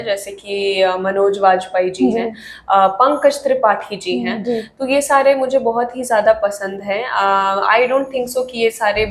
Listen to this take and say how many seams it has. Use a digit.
0